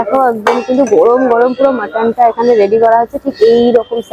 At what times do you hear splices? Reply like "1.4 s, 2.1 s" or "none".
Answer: none